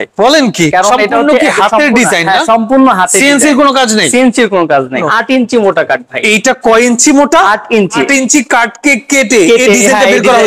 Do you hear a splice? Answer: yes; 3 cuts; at 0.7 s, 5.0 s, 8.0 s

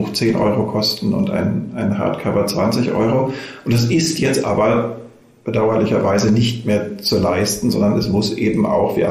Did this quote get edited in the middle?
yes; 1 cut; at 5.3 s

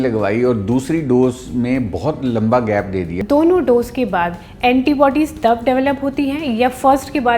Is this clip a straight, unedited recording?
no; 1 cut; at 3.2 s

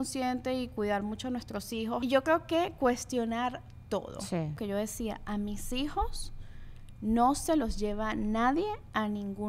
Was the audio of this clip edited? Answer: yes; 2 cuts; at 2.0 s, 4.6 s

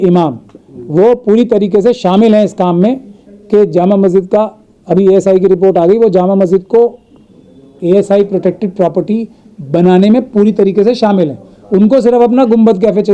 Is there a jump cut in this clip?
no; 0 cuts

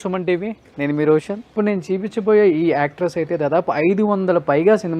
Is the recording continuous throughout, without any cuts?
no; 1 cut; at 1.4 s

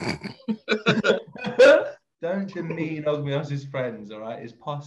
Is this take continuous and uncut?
no; 1 cut; at 2.0 s

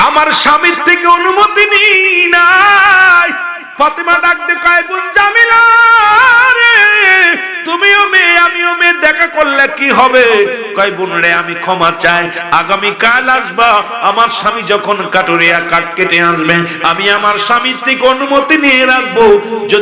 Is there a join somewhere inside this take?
yes; 1 cut; at 3.7 s

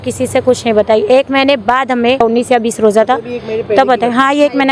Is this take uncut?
no; 1 cut; at 2.2 s

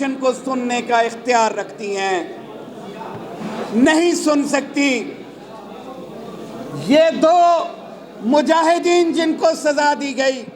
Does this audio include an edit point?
no; 0 cuts

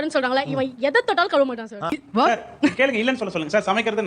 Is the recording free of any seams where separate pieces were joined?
no; 1 cut; at 1.9 s

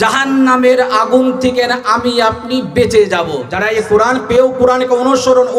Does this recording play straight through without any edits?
no; 1 cut; at 3.4 s

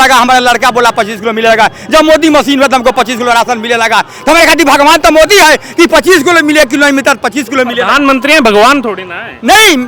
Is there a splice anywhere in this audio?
no; 0 cuts

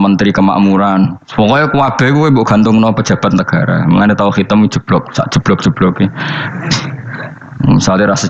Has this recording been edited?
yes; 1 cut; at 7.4 s

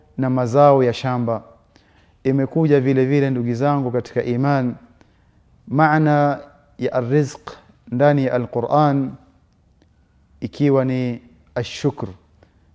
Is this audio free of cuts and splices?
yes; 0 cuts

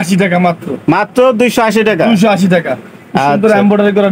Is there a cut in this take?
no; 0 cuts

